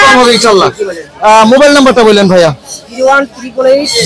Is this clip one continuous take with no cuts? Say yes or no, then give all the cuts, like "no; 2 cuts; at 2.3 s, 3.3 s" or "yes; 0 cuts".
yes; 0 cuts